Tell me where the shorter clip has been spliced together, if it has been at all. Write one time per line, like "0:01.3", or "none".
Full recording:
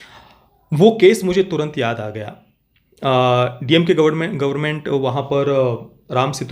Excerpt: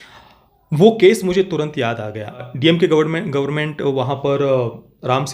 0:02.5

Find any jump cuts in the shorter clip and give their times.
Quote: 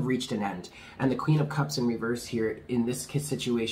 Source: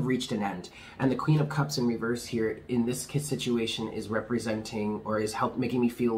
none

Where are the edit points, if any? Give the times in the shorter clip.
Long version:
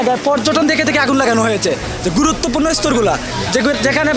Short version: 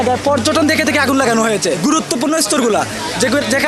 0:01.8

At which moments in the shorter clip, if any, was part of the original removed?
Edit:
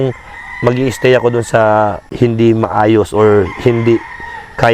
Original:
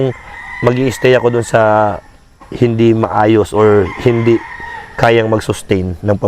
0:02.0

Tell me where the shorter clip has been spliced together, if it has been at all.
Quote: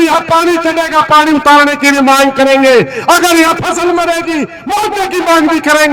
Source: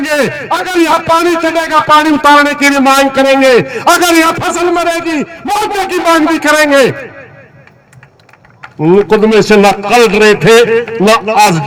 none

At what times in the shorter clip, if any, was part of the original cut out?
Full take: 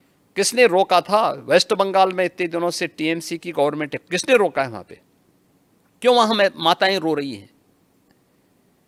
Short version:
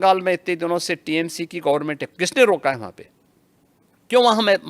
none

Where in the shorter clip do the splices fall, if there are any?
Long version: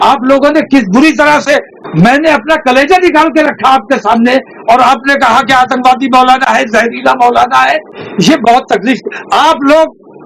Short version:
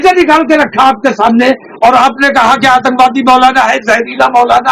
none

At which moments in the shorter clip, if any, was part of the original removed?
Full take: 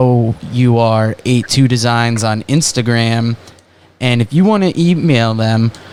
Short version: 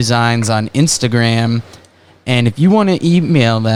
none

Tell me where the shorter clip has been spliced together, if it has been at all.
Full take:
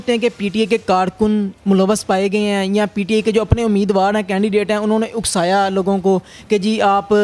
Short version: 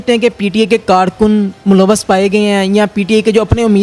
none

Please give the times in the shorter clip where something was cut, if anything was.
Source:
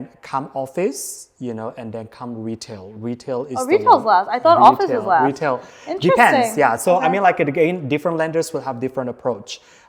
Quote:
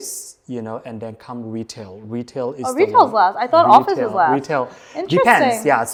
none

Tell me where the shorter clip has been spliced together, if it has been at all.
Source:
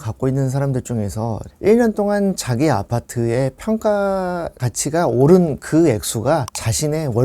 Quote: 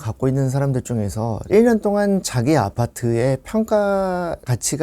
0:01.4

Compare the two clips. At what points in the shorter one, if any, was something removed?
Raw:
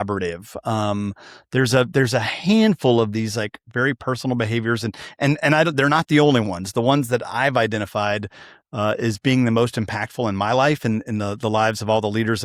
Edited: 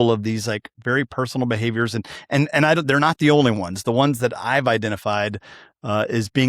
none

